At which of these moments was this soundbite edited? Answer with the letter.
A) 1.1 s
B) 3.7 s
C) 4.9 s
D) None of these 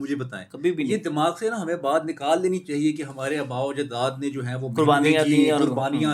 D